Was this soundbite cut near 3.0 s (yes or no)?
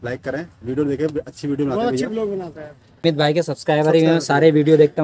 yes